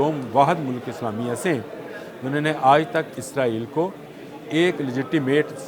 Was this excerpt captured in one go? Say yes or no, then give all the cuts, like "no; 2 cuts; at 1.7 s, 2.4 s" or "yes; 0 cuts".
yes; 0 cuts